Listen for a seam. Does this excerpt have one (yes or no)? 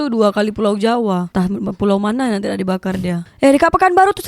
yes